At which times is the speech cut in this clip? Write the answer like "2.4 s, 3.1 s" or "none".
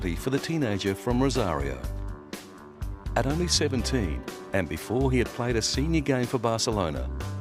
4.1 s